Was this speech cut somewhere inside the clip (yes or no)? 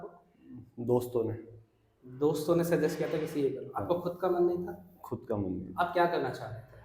no